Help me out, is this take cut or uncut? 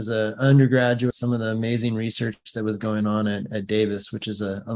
cut